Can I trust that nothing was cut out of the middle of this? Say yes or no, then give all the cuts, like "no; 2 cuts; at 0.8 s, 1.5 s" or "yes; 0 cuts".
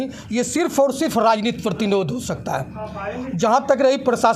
yes; 0 cuts